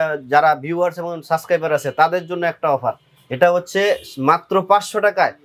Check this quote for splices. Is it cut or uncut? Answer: uncut